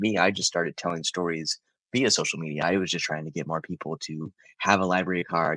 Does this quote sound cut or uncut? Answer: uncut